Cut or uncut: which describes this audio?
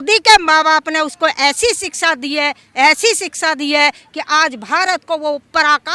uncut